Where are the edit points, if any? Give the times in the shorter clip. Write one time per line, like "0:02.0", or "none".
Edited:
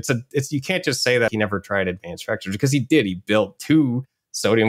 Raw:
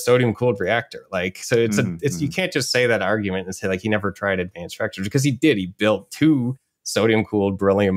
0:01.3